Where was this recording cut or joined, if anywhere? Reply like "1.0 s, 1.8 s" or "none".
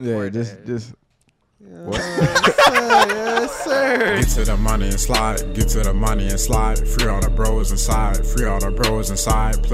4.2 s